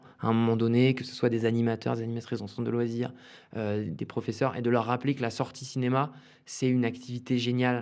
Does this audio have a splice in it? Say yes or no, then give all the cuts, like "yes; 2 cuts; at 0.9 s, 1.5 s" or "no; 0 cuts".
no; 0 cuts